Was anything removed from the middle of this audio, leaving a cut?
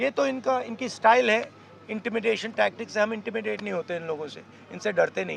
no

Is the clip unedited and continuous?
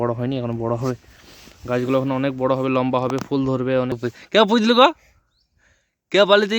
no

